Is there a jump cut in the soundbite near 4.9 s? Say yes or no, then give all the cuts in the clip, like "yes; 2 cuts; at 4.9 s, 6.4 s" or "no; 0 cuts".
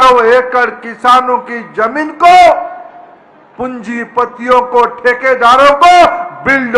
no; 0 cuts